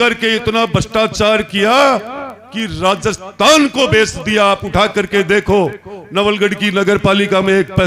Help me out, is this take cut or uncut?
uncut